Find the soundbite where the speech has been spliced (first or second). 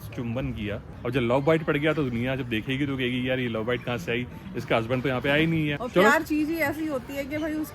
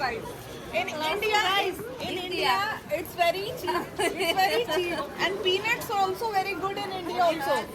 first